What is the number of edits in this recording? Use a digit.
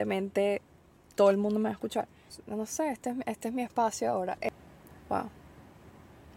1